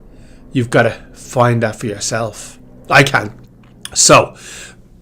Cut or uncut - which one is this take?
cut